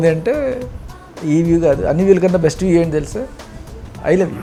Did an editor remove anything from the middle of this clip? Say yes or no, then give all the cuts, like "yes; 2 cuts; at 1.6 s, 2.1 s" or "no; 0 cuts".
no; 0 cuts